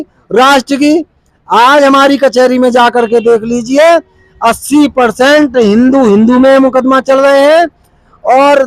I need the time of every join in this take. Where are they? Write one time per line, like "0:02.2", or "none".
none